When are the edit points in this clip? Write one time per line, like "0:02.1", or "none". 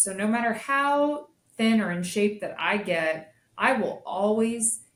none